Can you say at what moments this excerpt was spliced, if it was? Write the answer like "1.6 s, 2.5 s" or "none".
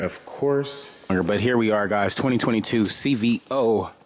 1.1 s